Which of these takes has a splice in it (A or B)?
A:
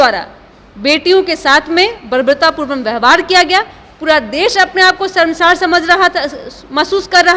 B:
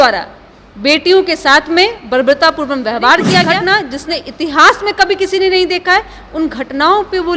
B